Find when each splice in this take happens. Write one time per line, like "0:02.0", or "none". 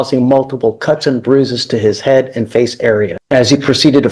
0:03.2